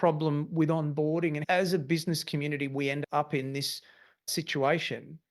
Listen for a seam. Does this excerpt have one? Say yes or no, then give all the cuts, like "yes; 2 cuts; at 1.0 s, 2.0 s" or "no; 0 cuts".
yes; 3 cuts; at 1.4 s, 3.0 s, 4.3 s